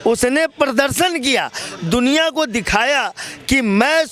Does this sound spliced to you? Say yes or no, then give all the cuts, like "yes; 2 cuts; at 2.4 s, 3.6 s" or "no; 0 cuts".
no; 0 cuts